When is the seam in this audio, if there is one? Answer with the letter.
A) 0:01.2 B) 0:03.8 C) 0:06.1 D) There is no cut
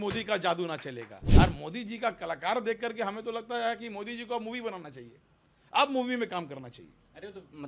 A